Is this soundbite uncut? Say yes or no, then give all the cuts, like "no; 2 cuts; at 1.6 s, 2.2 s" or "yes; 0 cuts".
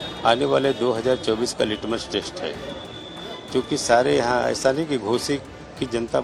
yes; 0 cuts